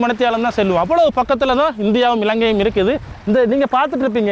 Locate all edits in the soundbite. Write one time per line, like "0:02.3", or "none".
none